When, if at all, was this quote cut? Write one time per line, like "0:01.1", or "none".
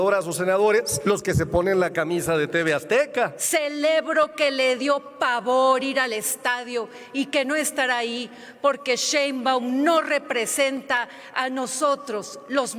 0:00.9
0:03.4